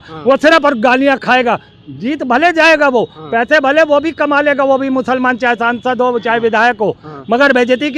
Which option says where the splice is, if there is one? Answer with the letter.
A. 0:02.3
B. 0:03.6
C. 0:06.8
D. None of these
D